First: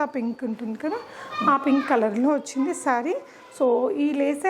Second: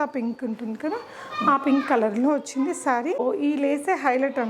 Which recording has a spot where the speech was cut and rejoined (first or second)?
second